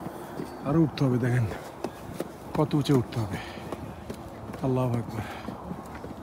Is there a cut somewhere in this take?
no; 0 cuts

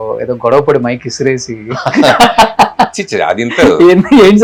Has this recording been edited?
no; 0 cuts

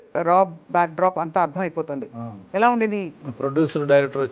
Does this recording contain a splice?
yes; 1 cut; at 3.1 s

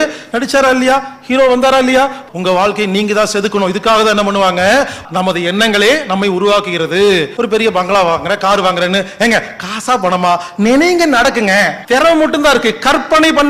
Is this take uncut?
no; 4 cuts; at 2.2 s, 5.0 s, 7.3 s, 11.8 s

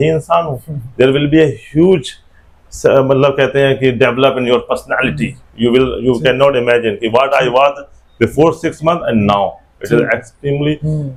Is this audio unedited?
yes; 0 cuts

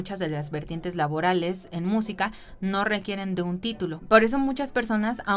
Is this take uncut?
no; 1 cut; at 4.0 s

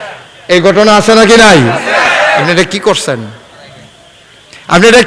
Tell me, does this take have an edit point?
no; 0 cuts

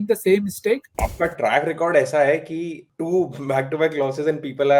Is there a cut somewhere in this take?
yes; 1 cut; at 0.9 s

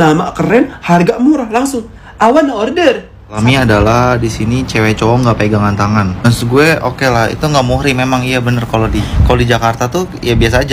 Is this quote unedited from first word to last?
no; 2 cuts; at 3.4 s, 9.1 s

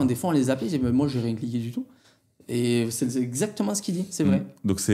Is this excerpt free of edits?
yes; 0 cuts

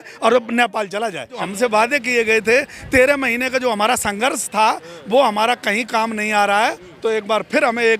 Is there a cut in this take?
yes; 1 cut; at 1.4 s

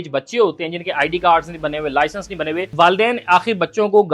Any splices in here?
yes; 1 cut; at 2.7 s

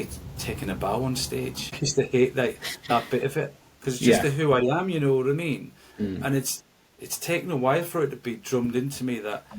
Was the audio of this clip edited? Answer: yes; 1 cut; at 1.8 s

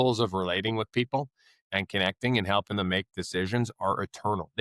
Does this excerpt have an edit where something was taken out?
no; 0 cuts

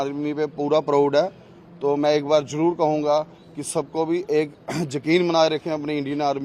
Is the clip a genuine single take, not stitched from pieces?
yes; 0 cuts

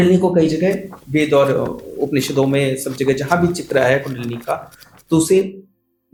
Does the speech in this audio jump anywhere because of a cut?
no; 0 cuts

